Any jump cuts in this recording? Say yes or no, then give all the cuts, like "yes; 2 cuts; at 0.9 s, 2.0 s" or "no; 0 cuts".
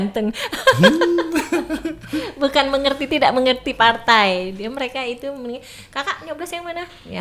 no; 0 cuts